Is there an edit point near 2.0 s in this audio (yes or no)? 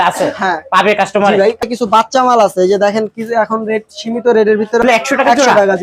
yes